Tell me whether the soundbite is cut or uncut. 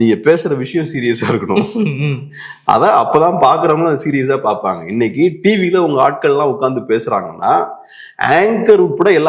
uncut